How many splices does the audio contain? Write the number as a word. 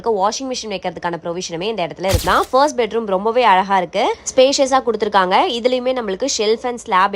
one